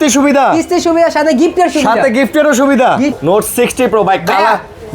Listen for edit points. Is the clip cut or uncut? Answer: cut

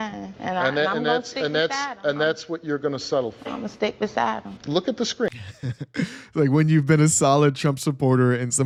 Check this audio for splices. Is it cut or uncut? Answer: uncut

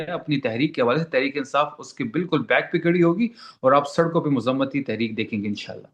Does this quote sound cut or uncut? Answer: uncut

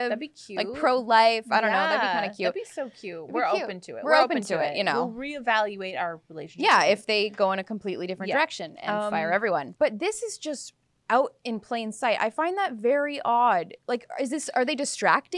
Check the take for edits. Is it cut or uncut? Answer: cut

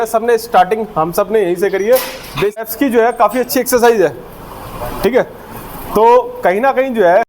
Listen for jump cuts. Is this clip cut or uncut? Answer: cut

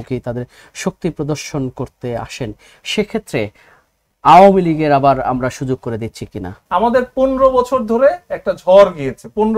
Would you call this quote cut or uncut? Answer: cut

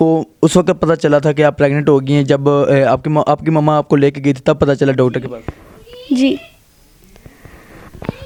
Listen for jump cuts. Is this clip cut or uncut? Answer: uncut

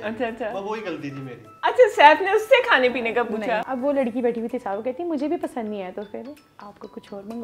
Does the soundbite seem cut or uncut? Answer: cut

